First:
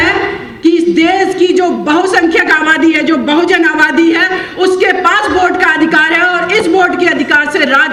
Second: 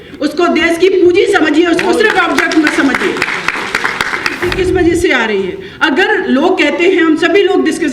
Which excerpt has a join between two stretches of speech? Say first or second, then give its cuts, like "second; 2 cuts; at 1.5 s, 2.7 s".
second; 1 cut; at 4.5 s